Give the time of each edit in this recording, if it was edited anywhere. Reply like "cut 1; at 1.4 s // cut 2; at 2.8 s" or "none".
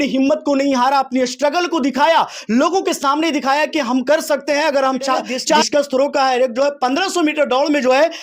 cut 1; at 5.6 s